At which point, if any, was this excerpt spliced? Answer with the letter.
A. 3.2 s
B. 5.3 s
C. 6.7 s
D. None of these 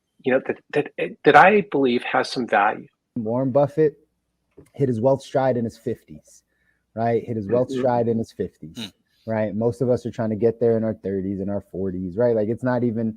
A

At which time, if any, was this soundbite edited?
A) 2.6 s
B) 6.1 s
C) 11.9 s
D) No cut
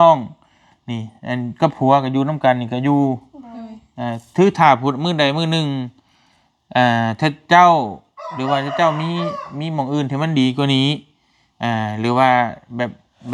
D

